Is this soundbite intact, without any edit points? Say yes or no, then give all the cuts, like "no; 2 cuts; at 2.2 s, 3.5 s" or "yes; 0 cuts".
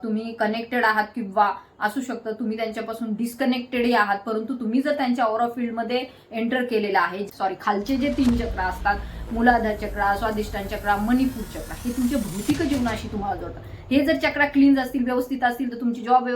no; 1 cut; at 7.2 s